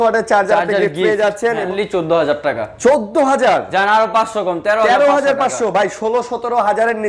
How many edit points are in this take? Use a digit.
1